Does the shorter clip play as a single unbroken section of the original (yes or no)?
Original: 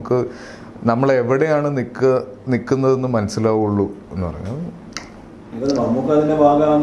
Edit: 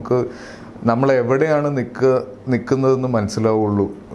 yes